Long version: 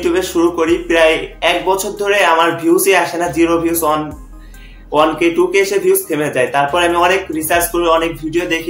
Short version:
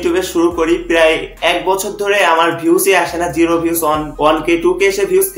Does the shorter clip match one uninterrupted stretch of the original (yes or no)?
no